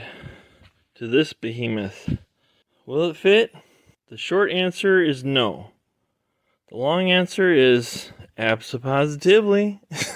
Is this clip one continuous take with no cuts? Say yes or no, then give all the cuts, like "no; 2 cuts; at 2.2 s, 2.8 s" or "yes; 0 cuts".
yes; 0 cuts